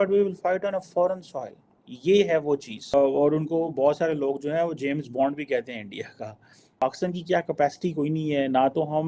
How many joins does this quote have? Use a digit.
2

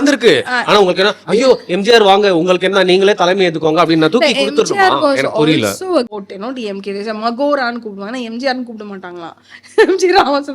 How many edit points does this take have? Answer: 1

